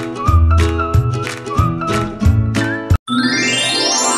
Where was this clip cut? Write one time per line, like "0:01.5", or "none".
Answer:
0:03.0